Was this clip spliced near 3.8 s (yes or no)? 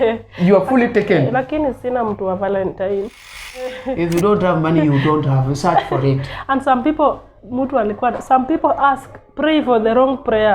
yes